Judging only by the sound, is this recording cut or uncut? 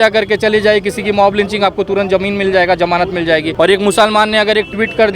cut